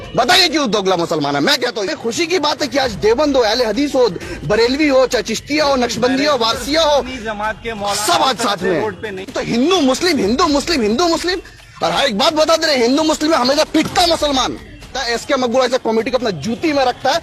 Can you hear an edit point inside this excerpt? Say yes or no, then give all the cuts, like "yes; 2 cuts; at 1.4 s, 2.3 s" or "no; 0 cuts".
yes; 3 cuts; at 1.9 s, 9.4 s, 15.0 s